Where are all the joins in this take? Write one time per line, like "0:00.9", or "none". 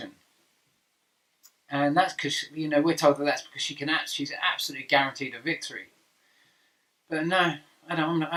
none